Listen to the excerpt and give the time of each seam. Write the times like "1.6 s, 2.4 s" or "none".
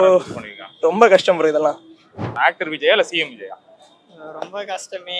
2.3 s